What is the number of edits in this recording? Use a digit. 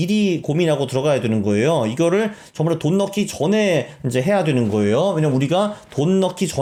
0